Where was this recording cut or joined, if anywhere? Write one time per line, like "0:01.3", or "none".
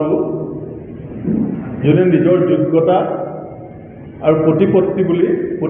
none